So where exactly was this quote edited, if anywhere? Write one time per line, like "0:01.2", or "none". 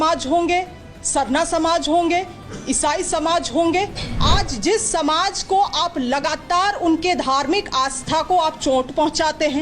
0:04.1